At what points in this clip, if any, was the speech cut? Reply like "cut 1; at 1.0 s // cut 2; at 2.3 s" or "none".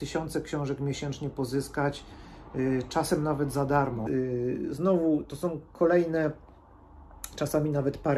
cut 1; at 4.0 s